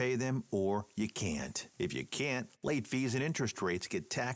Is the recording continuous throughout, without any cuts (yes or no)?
yes